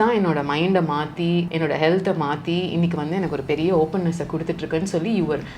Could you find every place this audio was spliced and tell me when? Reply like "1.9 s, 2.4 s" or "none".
1.5 s